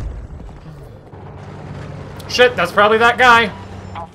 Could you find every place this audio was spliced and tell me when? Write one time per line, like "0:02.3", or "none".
0:01.1